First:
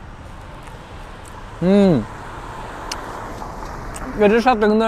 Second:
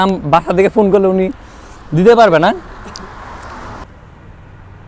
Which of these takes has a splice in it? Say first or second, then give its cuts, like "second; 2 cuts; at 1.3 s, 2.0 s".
second; 1 cut; at 3.8 s